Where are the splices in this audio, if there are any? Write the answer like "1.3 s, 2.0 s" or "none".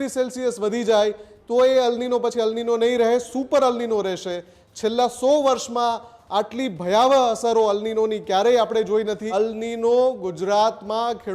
9.2 s